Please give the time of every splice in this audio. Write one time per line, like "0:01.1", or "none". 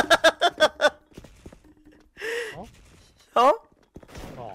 none